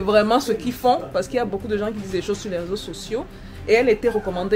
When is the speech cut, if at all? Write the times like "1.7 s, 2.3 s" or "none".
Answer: none